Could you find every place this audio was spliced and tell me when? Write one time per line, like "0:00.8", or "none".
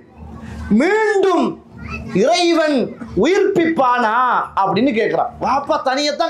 0:05.3